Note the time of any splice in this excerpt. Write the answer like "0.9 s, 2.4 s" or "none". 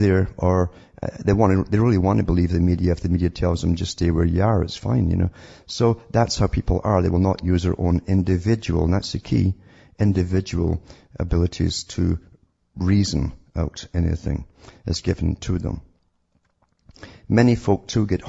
none